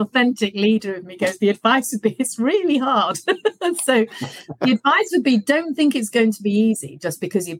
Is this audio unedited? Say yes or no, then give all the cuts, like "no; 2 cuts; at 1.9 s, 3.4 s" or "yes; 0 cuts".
yes; 0 cuts